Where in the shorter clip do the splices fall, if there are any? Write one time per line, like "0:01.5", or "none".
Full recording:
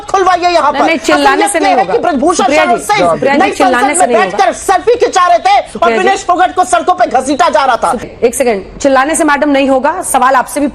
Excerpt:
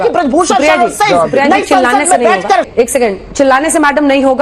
0:02.7